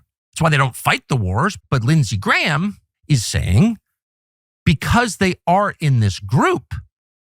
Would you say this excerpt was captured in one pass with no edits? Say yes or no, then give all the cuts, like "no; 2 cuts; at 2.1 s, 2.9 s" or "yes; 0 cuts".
no; 2 cuts; at 1.6 s, 2.9 s